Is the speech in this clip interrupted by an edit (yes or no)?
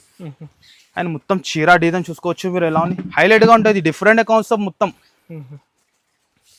no